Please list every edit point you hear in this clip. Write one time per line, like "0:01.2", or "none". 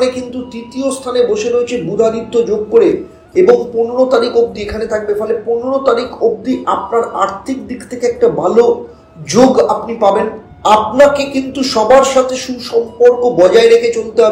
0:10.5